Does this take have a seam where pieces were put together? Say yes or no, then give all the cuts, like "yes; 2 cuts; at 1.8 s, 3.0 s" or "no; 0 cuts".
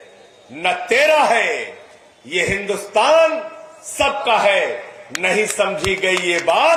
no; 0 cuts